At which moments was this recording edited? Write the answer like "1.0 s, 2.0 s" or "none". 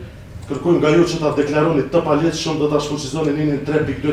none